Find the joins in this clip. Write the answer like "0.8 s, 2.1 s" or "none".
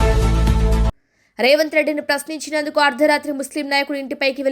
1.0 s